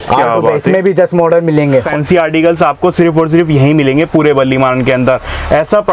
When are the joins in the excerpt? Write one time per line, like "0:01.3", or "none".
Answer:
0:01.9